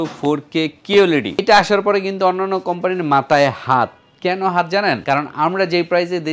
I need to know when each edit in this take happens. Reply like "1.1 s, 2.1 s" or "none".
1.4 s, 5.0 s